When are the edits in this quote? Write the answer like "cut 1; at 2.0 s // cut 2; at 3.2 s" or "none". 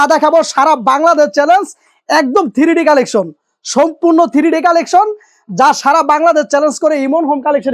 none